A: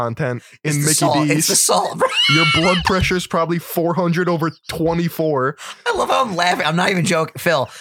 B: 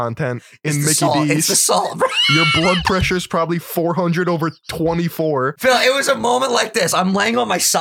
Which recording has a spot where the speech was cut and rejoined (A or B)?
B